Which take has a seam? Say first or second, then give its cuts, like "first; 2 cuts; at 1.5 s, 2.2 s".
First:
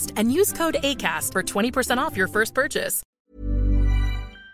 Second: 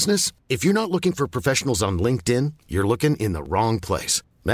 first; 1 cut; at 3.0 s